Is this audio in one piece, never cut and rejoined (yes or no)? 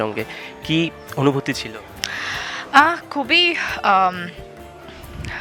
yes